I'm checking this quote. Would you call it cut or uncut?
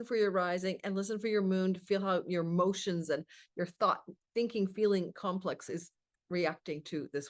uncut